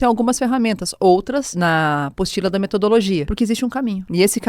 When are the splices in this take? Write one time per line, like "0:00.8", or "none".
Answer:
0:03.3